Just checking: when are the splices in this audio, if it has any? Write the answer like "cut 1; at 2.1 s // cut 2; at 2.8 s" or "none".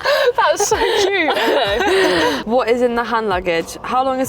cut 1; at 2.4 s